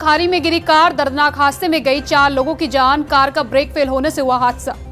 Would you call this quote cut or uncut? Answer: uncut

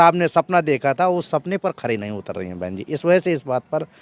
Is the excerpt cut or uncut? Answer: uncut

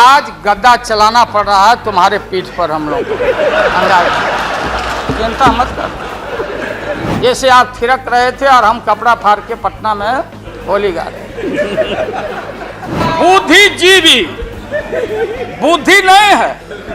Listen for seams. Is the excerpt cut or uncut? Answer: cut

